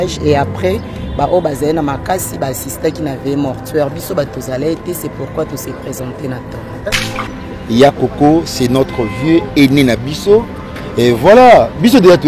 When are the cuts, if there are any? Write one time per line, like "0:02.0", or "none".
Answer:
0:07.0